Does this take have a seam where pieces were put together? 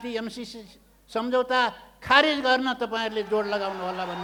no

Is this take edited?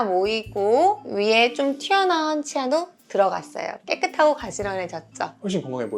yes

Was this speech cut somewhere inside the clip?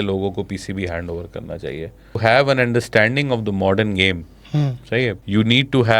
yes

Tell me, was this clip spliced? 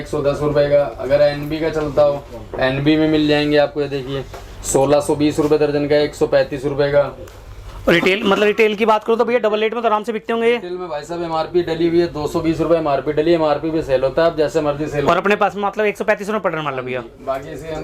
no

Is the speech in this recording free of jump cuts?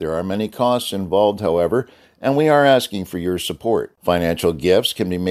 yes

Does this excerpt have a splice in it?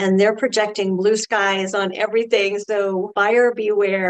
yes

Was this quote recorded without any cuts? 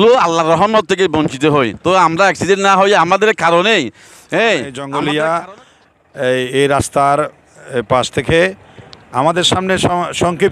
no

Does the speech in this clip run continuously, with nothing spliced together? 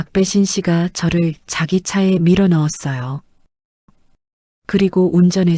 yes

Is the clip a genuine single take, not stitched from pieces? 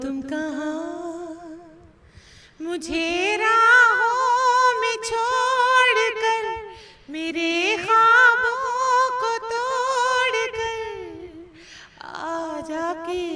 yes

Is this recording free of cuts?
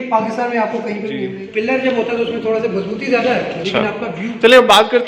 no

